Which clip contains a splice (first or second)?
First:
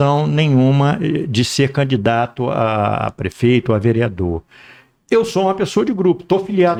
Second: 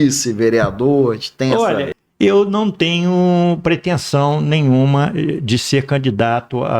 second